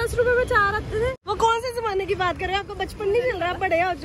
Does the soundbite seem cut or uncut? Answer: cut